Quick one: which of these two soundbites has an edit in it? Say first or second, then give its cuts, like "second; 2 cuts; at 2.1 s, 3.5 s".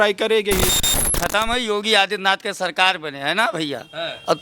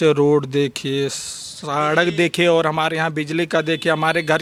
first; 1 cut; at 1.1 s